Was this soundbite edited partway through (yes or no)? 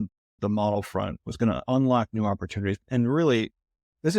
yes